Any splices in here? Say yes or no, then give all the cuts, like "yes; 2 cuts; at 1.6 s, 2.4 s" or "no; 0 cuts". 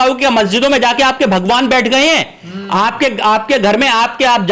no; 0 cuts